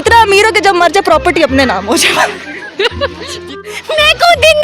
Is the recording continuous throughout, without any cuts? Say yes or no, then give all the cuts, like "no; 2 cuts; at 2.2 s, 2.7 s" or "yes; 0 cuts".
no; 1 cut; at 3.5 s